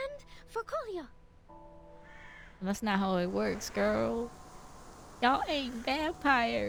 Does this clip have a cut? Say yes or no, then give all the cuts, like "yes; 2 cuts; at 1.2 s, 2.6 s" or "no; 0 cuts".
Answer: no; 0 cuts